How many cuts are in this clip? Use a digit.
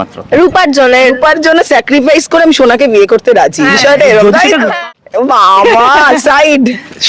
1